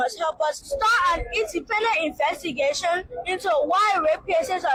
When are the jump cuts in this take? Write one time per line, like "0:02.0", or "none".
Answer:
none